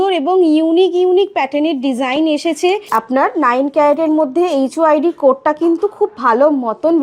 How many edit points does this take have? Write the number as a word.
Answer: one